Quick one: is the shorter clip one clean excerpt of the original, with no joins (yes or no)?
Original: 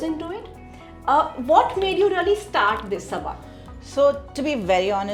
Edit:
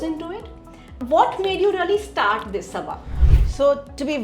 no